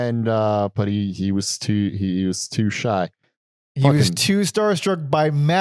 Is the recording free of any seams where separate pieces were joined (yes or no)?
yes